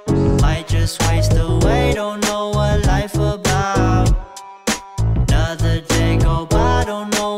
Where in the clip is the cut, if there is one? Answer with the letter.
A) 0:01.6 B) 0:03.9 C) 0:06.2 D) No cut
D